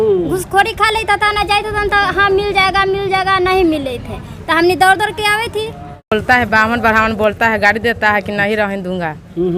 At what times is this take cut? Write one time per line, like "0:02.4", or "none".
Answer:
0:06.1